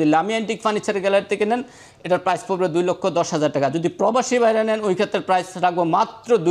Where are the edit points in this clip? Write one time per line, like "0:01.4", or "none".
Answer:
none